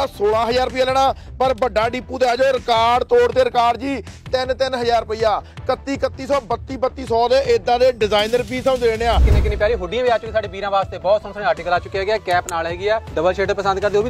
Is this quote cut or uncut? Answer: cut